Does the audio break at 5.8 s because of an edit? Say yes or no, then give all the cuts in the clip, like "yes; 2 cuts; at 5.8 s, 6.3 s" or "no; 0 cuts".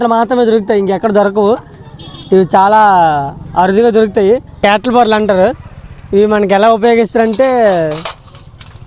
no; 1 cut; at 4.5 s